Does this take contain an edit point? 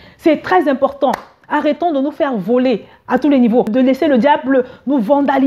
yes; 1 cut; at 3.7 s

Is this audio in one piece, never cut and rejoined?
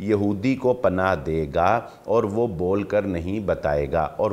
yes; 0 cuts

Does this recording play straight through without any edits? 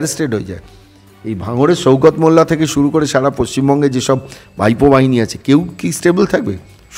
yes; 0 cuts

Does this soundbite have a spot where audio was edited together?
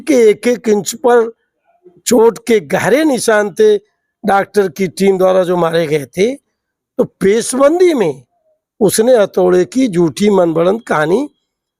no; 0 cuts

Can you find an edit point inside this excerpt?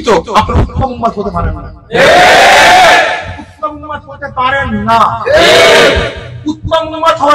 no; 0 cuts

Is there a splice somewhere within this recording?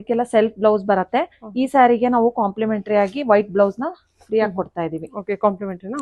no; 0 cuts

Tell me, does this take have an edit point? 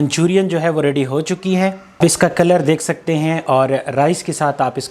yes; 1 cut; at 1.8 s

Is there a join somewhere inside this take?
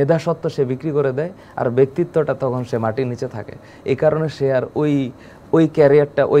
no; 0 cuts

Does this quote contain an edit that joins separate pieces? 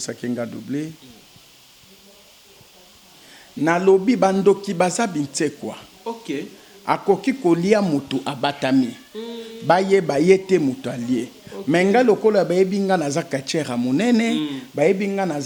no; 0 cuts

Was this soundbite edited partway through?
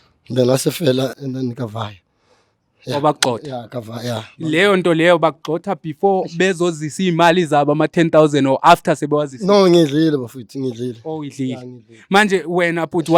yes; 1 cut; at 1.1 s

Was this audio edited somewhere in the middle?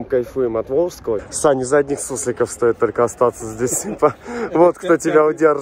yes; 1 cut; at 1.2 s

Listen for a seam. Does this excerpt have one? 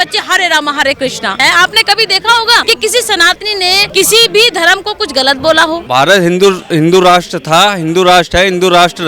yes; 4 cuts; at 1.4 s, 2.6 s, 3.9 s, 5.8 s

